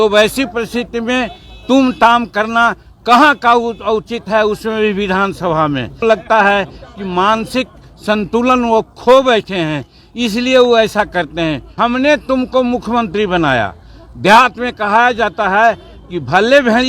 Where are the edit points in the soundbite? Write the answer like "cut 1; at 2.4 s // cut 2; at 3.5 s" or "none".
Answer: cut 1; at 6.0 s // cut 2; at 11.6 s